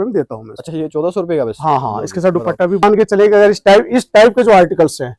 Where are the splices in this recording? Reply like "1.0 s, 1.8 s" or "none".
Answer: 2.8 s